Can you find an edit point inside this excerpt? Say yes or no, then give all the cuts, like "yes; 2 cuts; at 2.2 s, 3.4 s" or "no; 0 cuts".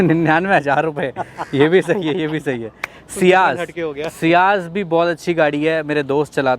no; 0 cuts